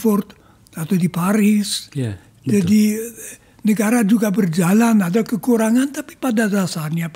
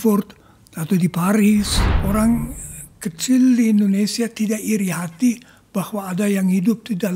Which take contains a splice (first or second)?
second